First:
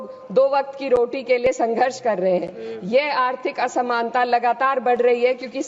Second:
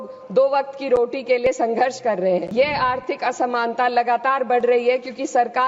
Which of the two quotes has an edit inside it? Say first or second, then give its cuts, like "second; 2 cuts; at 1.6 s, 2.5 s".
second; 1 cut; at 2.5 s